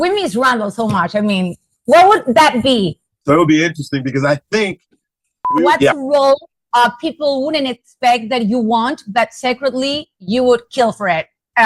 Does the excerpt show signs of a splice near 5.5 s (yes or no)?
yes